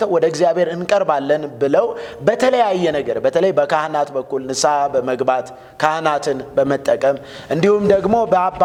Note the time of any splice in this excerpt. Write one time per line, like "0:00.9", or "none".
none